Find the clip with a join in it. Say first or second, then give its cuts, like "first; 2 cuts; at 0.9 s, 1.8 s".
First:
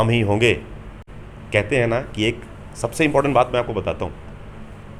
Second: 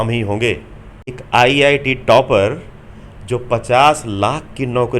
second; 1 cut; at 1.2 s